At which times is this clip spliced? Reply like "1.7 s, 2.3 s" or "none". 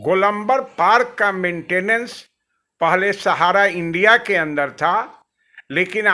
none